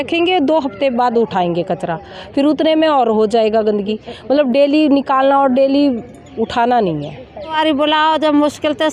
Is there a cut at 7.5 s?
yes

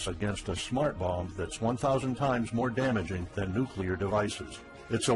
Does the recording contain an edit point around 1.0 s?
yes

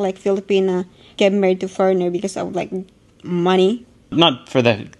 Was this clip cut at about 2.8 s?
no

